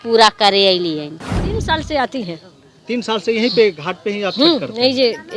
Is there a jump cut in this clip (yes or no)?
yes